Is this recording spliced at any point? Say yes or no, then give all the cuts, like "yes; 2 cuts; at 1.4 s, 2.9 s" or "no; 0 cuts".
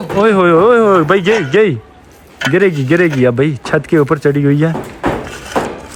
no; 0 cuts